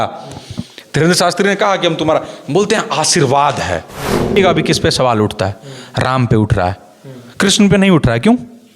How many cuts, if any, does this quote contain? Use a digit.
1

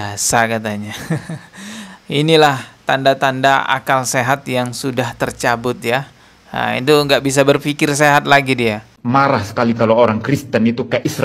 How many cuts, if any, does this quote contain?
1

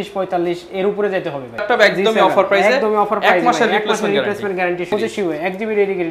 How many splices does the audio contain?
2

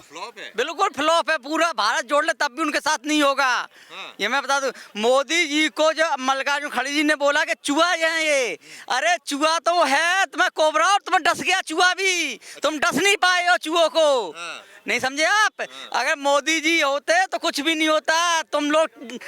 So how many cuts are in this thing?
0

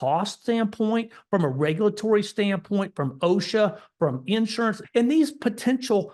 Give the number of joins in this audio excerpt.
1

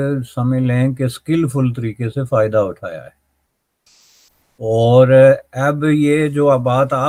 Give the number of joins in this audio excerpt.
0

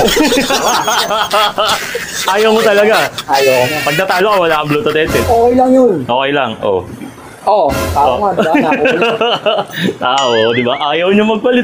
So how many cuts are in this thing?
0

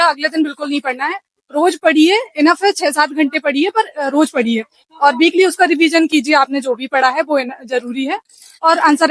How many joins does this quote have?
0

